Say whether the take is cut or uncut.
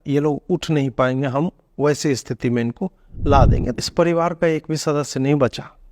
cut